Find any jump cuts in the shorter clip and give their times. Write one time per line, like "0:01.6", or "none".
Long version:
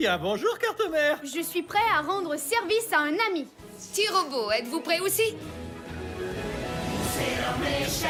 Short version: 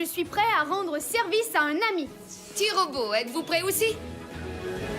0:04.0